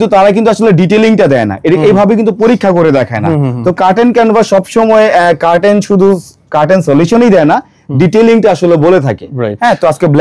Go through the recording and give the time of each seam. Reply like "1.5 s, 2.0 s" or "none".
none